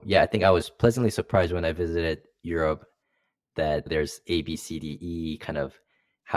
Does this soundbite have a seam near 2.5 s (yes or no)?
no